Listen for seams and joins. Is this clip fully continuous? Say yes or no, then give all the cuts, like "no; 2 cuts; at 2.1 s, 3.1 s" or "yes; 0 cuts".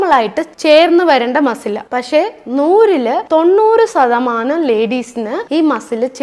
yes; 0 cuts